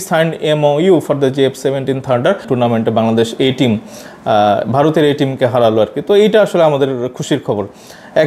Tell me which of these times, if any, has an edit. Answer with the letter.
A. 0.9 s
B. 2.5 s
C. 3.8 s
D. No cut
B